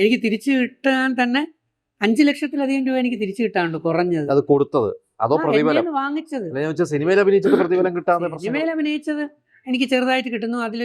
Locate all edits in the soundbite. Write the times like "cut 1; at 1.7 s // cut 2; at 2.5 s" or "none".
none